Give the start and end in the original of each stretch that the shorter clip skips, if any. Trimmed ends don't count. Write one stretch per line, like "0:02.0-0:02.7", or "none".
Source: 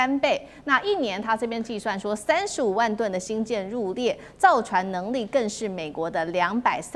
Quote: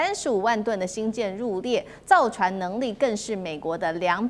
none